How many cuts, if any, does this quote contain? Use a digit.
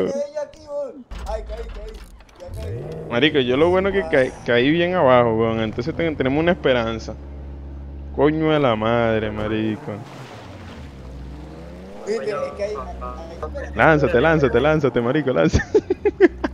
1